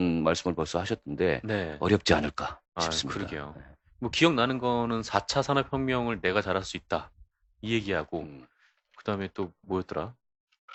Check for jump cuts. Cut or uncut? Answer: uncut